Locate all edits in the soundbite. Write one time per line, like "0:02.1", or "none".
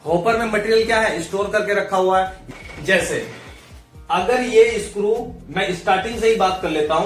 0:02.4